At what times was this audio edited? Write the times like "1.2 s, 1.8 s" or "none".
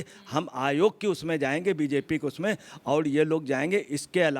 none

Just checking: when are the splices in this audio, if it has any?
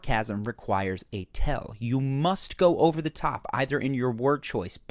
1.9 s

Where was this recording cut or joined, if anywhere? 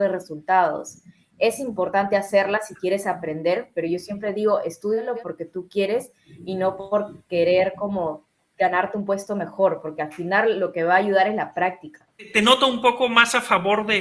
5.1 s, 12.2 s

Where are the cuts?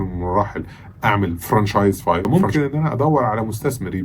2.2 s

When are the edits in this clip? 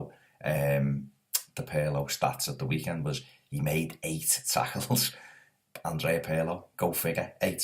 4.6 s

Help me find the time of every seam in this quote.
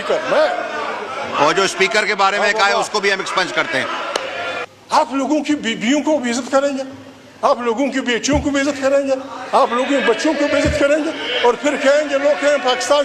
4.7 s

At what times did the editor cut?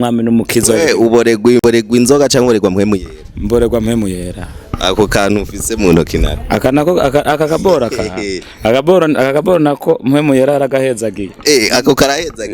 1.6 s

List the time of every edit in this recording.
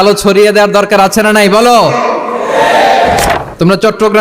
3.3 s

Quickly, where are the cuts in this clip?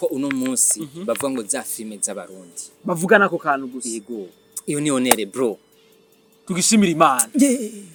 none

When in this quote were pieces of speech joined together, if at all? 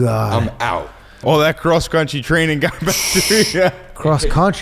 1.3 s

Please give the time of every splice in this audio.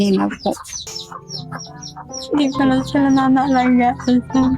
1.0 s

